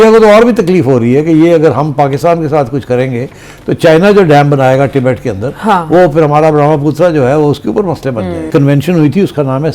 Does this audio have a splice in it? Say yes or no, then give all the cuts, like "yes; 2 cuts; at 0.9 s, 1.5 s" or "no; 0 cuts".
yes; 1 cut; at 8.5 s